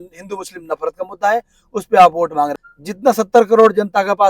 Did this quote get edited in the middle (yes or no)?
yes